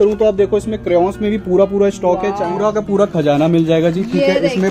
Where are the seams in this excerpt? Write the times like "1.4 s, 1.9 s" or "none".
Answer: 2.5 s